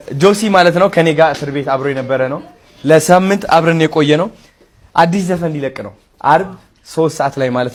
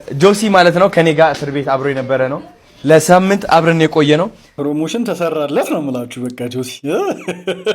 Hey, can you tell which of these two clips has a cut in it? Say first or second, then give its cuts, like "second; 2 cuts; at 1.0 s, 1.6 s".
second; 1 cut; at 4.4 s